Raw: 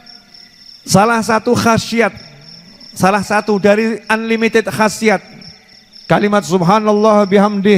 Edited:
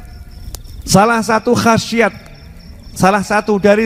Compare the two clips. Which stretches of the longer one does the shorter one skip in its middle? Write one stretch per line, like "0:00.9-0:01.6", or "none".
none